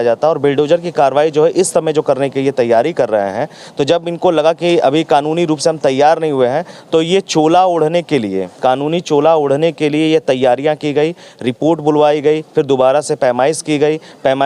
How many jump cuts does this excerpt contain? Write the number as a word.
zero